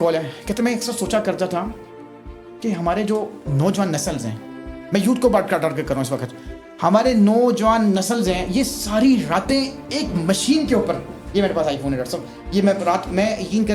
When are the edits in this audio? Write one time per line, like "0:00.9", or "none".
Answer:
none